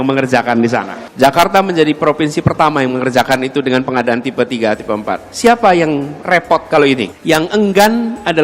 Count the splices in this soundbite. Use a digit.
2